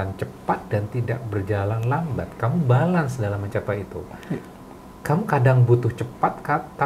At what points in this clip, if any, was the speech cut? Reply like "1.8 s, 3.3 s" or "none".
none

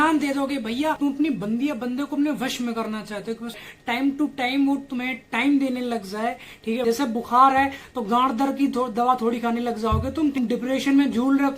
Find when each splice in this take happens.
1.0 s, 3.6 s, 6.8 s, 10.4 s

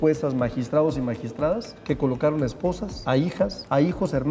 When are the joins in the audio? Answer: 1.7 s, 3.3 s

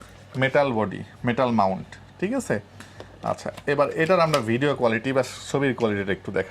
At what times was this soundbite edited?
none

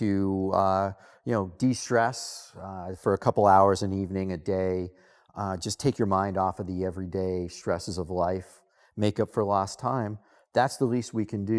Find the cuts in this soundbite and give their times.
none

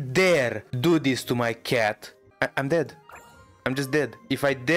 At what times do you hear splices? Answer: none

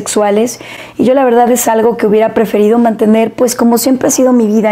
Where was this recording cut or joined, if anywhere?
none

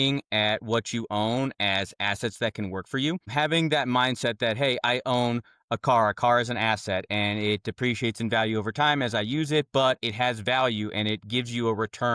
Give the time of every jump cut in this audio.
3.3 s

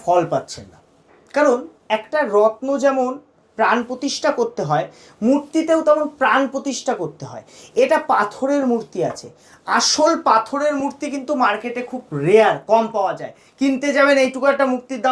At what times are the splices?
none

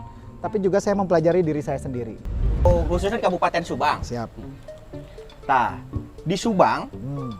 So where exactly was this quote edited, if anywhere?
2.7 s

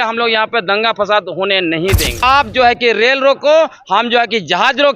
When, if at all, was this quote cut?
2.2 s

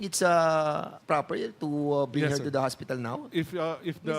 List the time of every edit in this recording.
0.9 s, 3.3 s

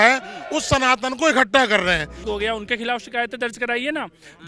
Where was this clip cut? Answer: 2.2 s

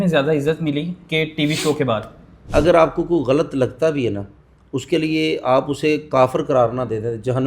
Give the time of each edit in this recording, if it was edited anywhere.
2.3 s

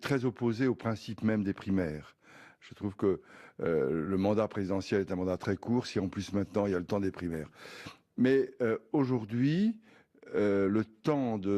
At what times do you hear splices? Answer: 2.0 s

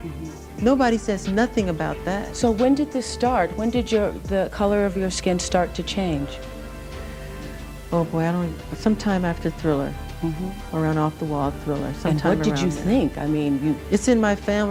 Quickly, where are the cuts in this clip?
none

